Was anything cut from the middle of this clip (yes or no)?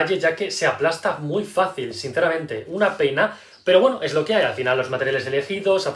no